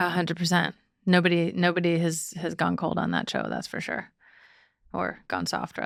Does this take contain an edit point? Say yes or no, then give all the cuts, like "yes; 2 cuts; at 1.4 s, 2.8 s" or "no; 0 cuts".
no; 0 cuts